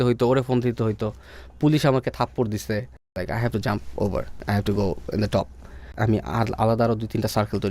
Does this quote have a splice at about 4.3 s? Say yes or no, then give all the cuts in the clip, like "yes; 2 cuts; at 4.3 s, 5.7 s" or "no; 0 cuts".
yes; 3 cuts; at 3.2 s, 4.3 s, 5.9 s